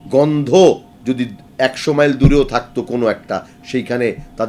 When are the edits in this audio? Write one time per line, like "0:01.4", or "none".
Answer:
0:00.9